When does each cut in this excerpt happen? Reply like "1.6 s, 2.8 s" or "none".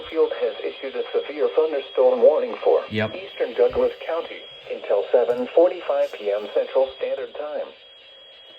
3.5 s, 4.8 s, 7.0 s